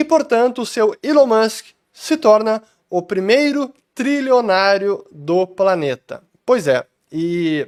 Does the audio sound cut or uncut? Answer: uncut